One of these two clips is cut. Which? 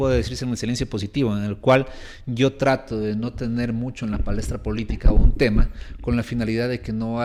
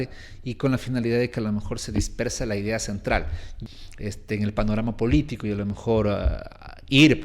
second; 1 cut; at 3.4 s

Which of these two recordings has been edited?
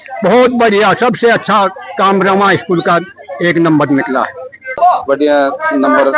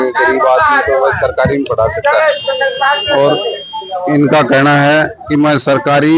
first; 1 cut; at 4.8 s

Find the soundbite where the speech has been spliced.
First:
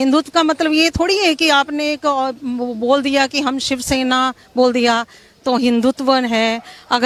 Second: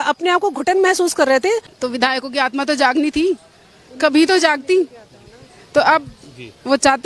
second; 1 cut; at 1.7 s

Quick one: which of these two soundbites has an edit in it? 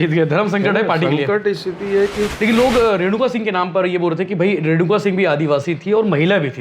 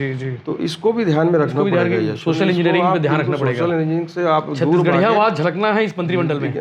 first; 1 cut; at 2.3 s

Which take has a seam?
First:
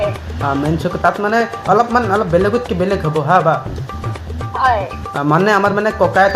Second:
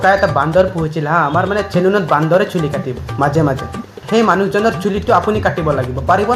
second; 1 cut; at 3.9 s

